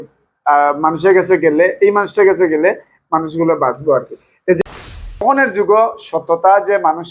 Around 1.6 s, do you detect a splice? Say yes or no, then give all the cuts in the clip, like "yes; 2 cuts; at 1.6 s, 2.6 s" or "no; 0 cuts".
no; 1 cut; at 4.6 s